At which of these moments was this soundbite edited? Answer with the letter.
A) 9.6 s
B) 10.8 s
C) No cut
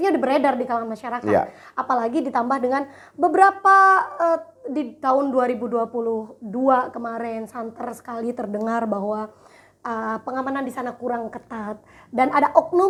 C